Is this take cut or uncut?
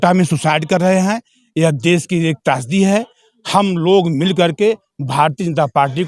uncut